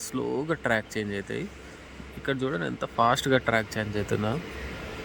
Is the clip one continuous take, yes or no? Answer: yes